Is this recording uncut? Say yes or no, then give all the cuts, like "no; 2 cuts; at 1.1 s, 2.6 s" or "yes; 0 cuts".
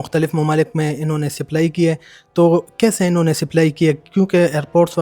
yes; 0 cuts